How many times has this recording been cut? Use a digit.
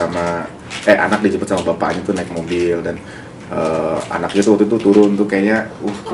0